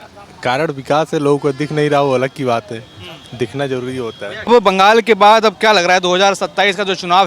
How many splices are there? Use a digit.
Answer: 1